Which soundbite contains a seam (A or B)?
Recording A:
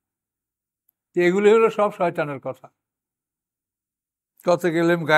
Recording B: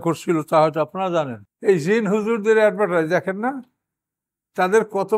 B